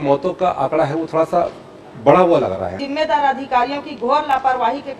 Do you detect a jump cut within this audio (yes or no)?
yes